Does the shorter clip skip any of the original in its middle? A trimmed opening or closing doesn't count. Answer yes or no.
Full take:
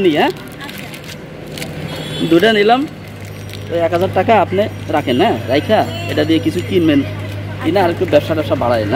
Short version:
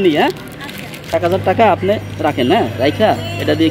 yes